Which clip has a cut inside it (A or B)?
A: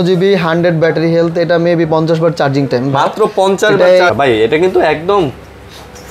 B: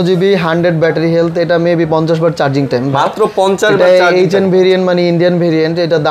A